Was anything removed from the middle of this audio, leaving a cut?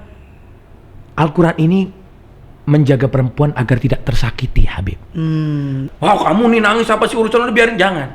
yes; 1 cut; at 5.8 s

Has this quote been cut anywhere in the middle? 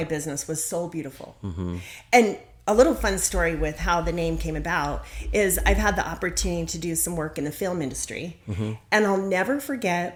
no; 0 cuts

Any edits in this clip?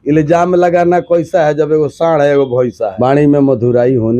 yes; 1 cut; at 2.9 s

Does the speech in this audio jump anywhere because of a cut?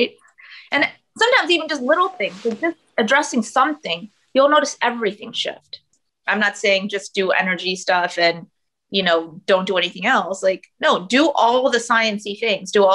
yes; 1 cut; at 5.9 s

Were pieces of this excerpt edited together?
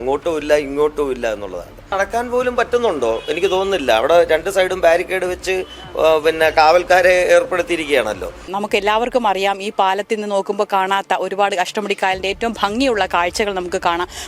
yes; 2 cuts; at 1.9 s, 8.5 s

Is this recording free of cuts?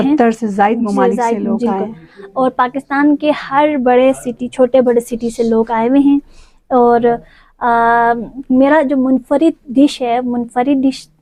yes; 0 cuts

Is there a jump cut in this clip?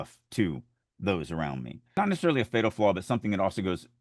yes; 1 cut; at 1.9 s

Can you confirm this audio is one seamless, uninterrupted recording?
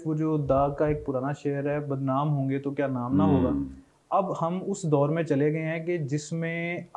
yes; 0 cuts

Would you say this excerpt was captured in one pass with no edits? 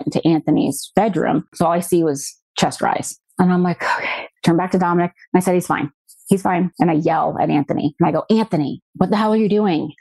no; 1 cut; at 1.5 s

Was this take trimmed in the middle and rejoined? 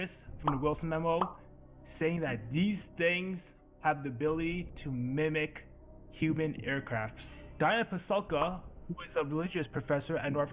yes; 1 cut; at 7.5 s

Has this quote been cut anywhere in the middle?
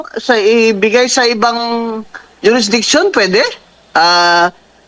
no; 0 cuts

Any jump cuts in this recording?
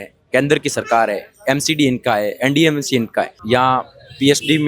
yes; 1 cut; at 3.4 s

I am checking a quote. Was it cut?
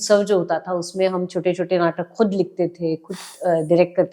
no; 0 cuts

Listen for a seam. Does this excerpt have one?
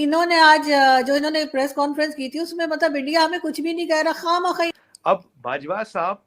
yes; 1 cut; at 4.7 s

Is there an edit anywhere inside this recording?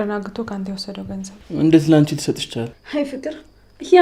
yes; 2 cuts; at 1.3 s, 2.8 s

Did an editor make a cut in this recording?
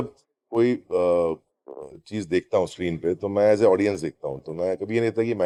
no; 0 cuts

